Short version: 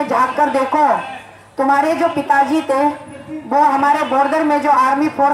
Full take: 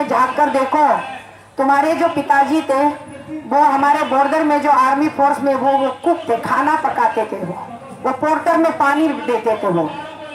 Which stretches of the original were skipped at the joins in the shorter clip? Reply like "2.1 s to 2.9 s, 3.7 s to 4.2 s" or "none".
none